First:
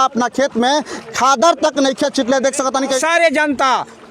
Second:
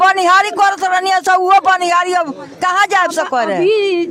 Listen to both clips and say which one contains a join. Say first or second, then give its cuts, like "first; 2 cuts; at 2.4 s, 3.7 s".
first; 1 cut; at 2.9 s